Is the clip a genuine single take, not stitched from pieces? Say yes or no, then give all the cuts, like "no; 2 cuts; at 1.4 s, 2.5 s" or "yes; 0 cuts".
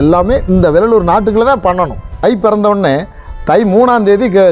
no; 1 cut; at 2.0 s